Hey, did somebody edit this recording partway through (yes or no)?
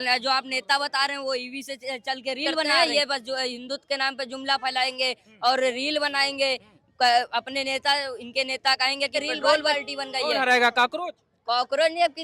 yes